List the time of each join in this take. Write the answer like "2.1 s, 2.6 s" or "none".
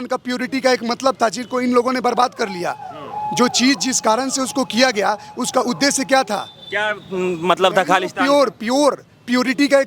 none